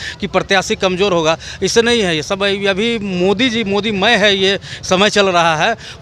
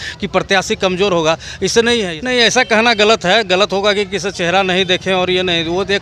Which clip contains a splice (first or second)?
second